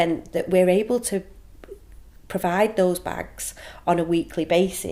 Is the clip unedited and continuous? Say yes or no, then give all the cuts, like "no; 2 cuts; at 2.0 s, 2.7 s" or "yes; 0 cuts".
yes; 0 cuts